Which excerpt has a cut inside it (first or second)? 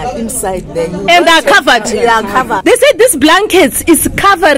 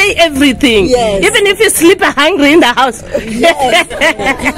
first